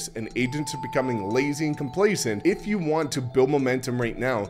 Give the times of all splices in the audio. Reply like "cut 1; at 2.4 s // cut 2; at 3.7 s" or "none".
cut 1; at 2.4 s